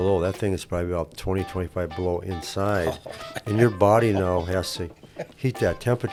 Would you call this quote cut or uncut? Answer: uncut